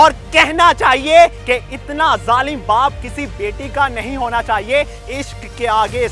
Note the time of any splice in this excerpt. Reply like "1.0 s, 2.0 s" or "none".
1.4 s, 5.0 s